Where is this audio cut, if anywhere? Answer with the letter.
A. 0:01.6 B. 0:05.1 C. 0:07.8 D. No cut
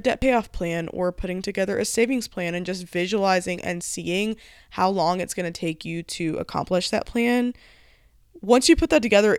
D